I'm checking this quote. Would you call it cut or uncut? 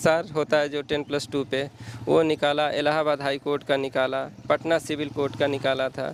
uncut